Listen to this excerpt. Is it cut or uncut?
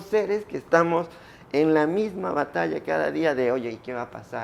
uncut